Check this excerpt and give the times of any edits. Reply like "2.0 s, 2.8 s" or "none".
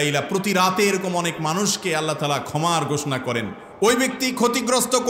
3.6 s